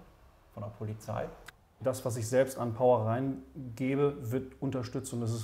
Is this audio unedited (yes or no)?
no